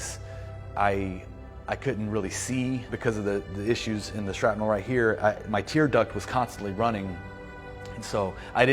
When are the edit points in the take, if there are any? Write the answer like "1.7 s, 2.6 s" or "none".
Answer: 2.9 s